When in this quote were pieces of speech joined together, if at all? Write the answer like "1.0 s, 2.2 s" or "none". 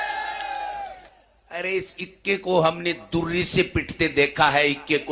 1.1 s